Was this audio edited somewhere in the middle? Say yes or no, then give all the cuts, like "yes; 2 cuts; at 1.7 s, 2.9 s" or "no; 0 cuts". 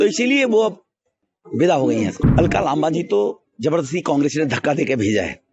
yes; 1 cut; at 2.2 s